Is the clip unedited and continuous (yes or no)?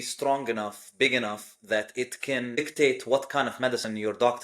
no